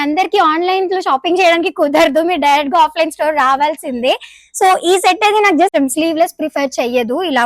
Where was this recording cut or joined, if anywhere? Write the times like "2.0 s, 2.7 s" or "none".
5.7 s